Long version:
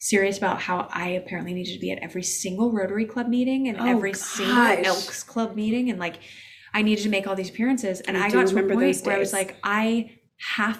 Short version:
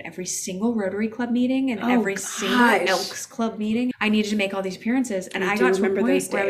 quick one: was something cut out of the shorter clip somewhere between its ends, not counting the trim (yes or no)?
yes